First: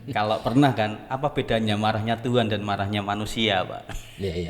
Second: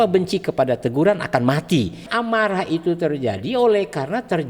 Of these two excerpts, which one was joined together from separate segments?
second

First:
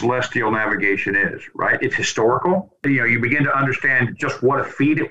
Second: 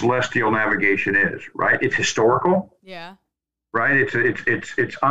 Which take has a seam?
first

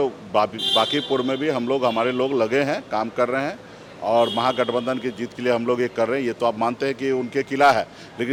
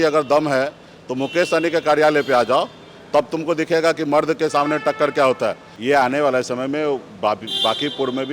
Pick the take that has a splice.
second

